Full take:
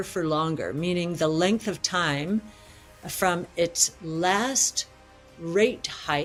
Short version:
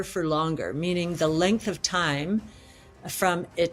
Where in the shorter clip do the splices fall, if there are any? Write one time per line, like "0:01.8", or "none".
none